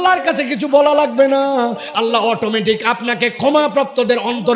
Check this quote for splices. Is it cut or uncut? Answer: uncut